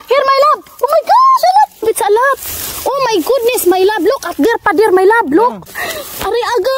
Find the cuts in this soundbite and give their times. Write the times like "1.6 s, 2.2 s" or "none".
1.8 s, 5.7 s